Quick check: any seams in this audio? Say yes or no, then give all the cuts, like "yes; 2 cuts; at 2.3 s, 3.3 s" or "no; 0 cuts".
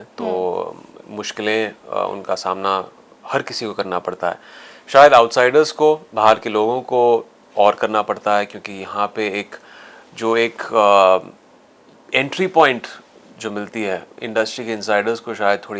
no; 0 cuts